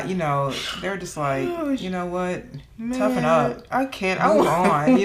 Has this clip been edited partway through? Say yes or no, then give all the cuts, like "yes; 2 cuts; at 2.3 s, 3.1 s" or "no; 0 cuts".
no; 0 cuts